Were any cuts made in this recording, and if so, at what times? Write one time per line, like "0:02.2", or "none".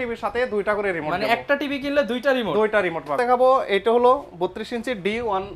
0:03.2